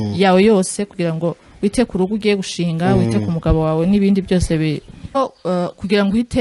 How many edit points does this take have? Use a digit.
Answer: 1